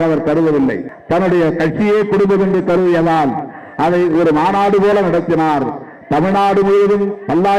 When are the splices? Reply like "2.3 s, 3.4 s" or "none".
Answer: 0.9 s